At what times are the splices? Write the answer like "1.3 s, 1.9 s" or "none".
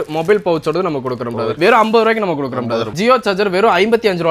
1.5 s, 2.9 s